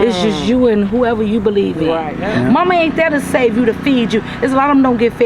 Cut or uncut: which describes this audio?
cut